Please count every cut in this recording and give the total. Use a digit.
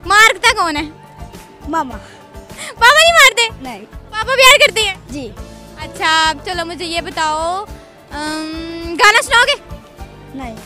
0